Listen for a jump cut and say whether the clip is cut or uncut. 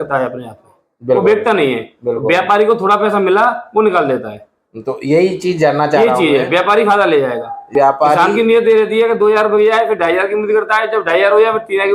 cut